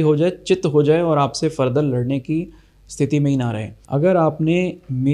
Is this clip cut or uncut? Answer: cut